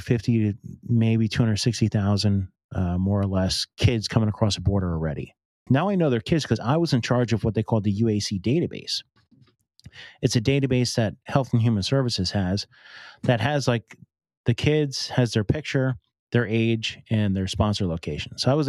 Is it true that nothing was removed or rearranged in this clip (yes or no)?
no